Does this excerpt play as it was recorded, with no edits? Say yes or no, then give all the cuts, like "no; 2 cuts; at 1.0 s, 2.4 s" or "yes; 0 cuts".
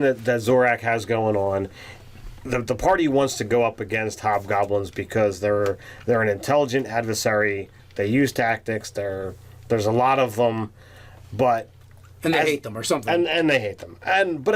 no; 1 cut; at 2.3 s